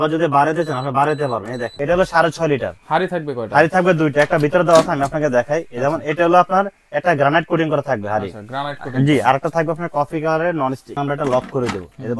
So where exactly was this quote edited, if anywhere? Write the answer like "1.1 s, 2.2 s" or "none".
1.7 s, 10.9 s